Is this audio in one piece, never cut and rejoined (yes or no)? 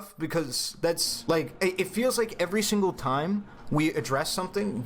no